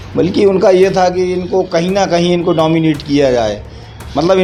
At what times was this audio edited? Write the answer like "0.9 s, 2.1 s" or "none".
none